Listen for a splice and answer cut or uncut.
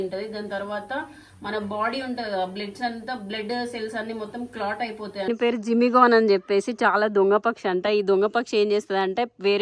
cut